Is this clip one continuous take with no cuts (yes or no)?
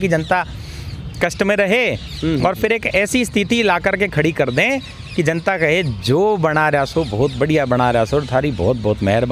yes